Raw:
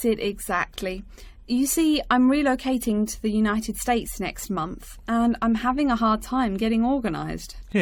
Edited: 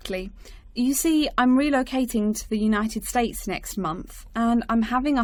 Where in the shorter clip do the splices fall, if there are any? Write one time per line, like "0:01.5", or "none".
none